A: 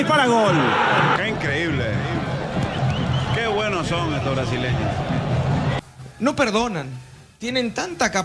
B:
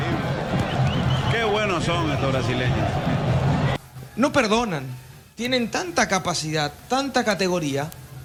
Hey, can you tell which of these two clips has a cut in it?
A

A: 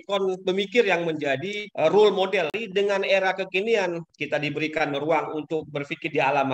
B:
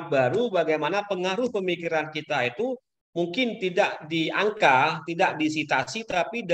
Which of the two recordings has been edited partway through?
A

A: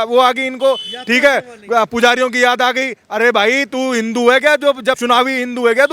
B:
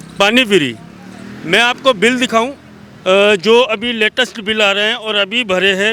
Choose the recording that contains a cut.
A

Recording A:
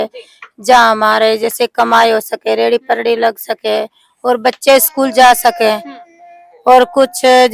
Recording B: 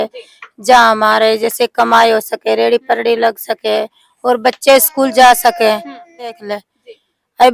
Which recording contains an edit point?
B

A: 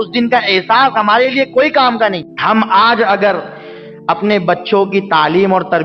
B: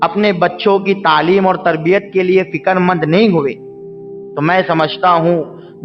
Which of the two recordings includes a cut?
A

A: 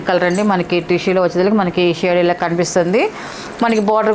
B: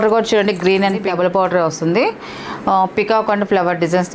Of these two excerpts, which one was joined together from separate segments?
B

